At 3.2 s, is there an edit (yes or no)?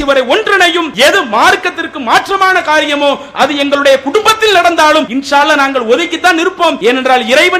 no